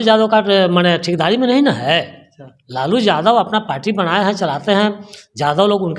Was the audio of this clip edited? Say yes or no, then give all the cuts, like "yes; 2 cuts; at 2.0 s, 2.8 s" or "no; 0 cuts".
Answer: no; 0 cuts